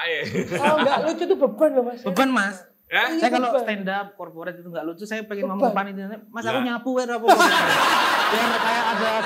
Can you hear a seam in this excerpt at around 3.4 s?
no; 0 cuts

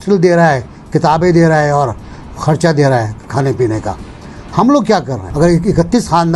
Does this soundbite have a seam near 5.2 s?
yes; 1 cut; at 5.2 s

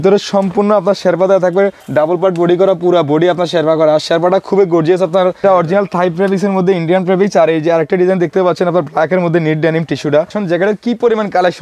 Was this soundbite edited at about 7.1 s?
no; 3 cuts; at 1.8 s, 5.4 s, 10.4 s

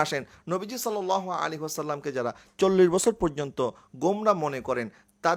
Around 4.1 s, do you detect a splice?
no; 0 cuts

